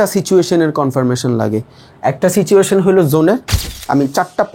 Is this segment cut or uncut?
cut